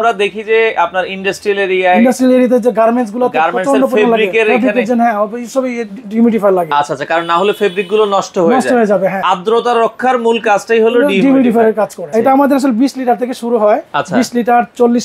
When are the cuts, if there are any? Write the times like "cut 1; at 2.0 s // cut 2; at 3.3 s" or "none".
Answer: cut 1; at 9.2 s // cut 2; at 12.1 s